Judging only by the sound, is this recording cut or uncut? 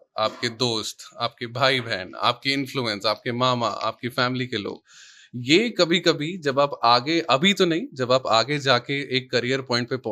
uncut